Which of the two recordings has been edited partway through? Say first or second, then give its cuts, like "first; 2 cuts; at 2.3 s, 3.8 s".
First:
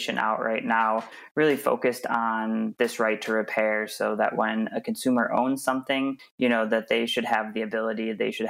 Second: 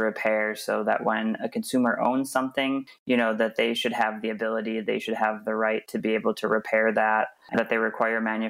second; 1 cut; at 7.5 s